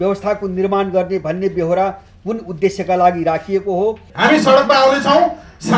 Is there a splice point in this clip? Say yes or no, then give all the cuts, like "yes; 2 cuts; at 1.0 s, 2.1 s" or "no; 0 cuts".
yes; 1 cut; at 4.1 s